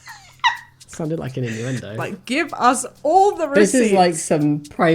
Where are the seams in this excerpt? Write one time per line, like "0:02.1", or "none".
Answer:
0:02.1